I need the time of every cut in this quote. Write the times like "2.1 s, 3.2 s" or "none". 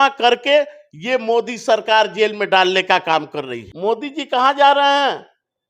3.6 s